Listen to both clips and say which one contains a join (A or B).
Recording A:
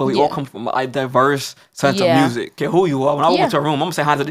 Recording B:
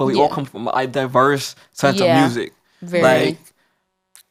A